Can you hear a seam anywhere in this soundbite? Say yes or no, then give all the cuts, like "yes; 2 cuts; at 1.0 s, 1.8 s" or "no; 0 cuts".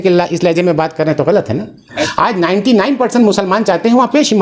yes; 1 cut; at 2.0 s